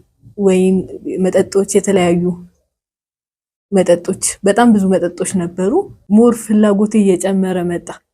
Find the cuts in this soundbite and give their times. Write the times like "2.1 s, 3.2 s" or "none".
6.0 s